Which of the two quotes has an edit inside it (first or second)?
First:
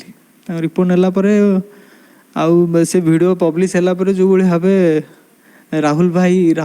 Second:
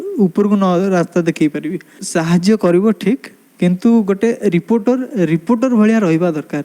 second